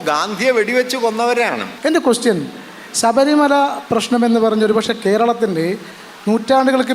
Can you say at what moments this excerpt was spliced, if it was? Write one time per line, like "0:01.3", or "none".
0:01.7